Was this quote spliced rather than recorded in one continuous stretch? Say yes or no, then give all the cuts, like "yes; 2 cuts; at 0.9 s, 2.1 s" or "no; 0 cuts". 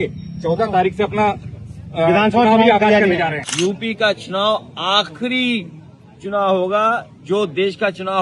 yes; 1 cut; at 3.4 s